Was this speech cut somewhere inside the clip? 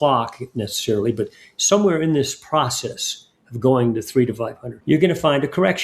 yes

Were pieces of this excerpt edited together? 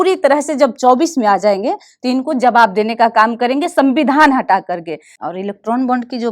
yes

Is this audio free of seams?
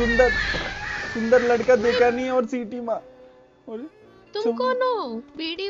yes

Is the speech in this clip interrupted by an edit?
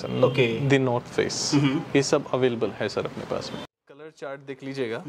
yes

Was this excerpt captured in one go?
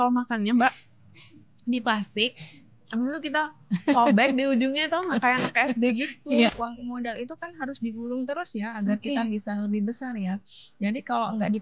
no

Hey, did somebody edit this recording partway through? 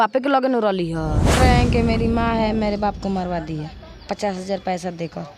yes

